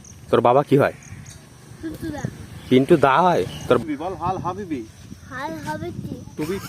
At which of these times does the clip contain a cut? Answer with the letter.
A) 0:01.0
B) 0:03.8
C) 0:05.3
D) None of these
B